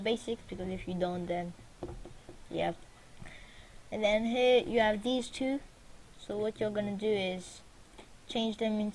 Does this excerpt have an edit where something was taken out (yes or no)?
no